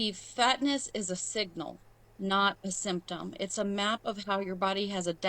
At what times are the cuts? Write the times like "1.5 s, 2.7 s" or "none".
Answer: 3.5 s